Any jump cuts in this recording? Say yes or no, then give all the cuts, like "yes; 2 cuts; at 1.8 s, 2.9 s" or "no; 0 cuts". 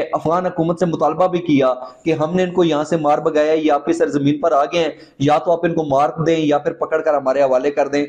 no; 0 cuts